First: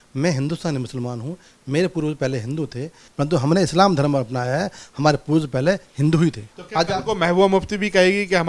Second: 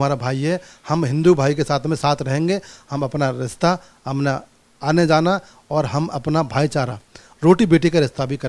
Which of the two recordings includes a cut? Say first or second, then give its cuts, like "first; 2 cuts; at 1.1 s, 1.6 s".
first; 2 cuts; at 3.0 s, 6.5 s